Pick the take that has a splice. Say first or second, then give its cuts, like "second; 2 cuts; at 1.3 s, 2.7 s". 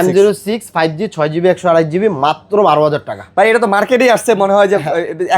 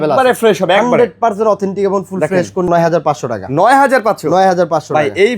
second; 1 cut; at 2.7 s